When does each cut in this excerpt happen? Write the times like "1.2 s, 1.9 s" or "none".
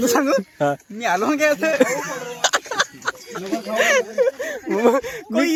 none